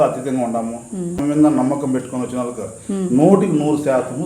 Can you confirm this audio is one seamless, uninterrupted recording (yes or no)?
no